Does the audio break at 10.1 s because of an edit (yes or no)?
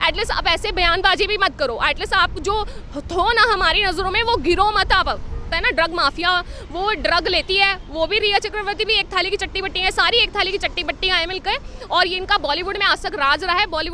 no